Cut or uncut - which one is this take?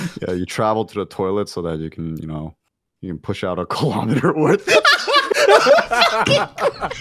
uncut